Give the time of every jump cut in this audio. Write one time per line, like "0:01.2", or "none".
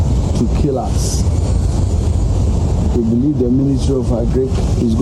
none